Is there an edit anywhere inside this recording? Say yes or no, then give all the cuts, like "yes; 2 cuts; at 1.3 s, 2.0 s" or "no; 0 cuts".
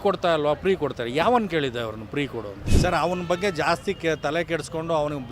yes; 1 cut; at 2.6 s